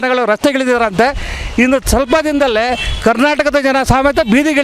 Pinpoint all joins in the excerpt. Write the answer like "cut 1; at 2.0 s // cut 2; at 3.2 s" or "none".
none